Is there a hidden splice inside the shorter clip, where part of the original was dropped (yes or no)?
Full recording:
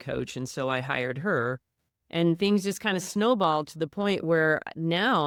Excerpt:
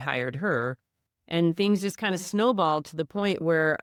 no